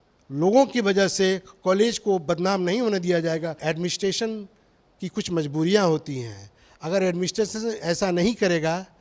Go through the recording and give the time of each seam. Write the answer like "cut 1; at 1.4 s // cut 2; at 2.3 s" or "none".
cut 1; at 3.6 s